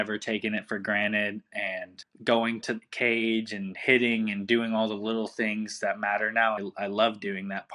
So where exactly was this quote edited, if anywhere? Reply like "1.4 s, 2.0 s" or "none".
2.0 s, 6.6 s